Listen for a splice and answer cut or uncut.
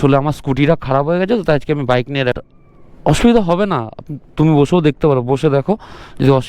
cut